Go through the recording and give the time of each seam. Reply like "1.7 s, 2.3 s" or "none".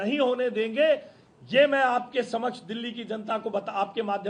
none